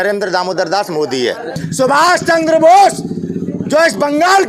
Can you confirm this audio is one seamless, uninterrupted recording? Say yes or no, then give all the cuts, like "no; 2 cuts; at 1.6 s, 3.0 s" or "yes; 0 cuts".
no; 1 cut; at 1.6 s